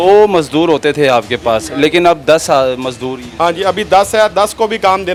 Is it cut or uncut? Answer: uncut